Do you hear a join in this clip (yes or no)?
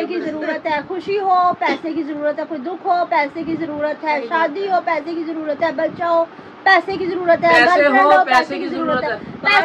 no